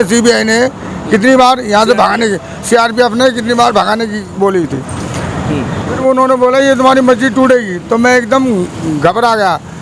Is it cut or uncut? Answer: cut